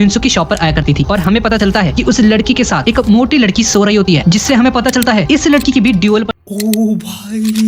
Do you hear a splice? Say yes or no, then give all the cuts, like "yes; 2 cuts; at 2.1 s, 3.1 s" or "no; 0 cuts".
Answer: no; 0 cuts